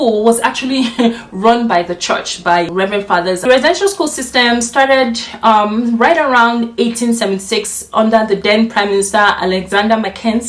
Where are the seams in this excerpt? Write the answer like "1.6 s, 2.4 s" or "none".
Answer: none